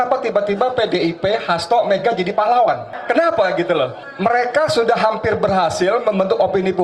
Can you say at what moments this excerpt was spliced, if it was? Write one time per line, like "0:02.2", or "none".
0:02.9
0:04.0